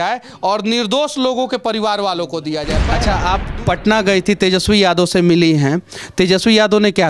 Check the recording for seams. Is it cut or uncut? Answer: cut